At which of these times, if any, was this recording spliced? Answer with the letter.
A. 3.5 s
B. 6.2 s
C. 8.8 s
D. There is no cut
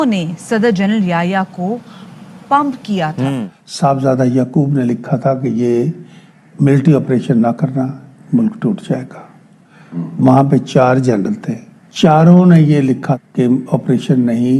A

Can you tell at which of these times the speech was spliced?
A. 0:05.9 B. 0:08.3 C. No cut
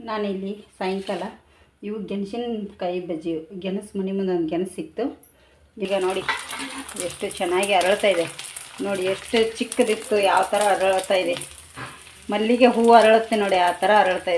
A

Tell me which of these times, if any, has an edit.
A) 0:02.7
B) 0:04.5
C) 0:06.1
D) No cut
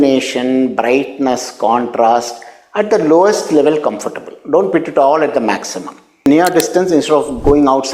C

